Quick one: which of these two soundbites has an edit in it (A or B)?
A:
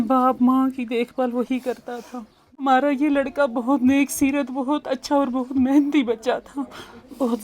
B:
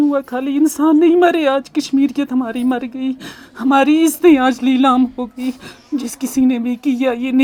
A